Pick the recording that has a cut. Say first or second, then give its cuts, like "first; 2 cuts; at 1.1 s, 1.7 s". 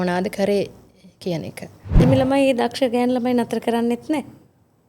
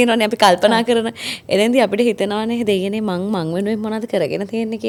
first; 1 cut; at 2.0 s